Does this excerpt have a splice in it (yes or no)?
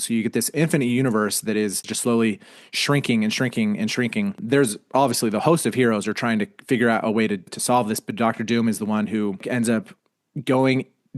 yes